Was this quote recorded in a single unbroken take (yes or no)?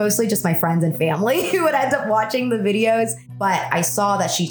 no